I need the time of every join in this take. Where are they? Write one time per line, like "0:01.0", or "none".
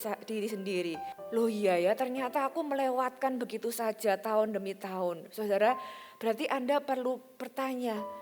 0:01.1